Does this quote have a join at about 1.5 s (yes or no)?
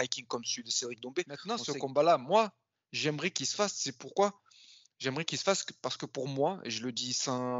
yes